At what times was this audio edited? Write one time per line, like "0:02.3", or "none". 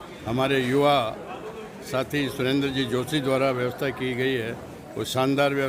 none